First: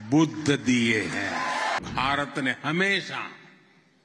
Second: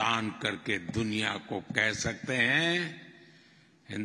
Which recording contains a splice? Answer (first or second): first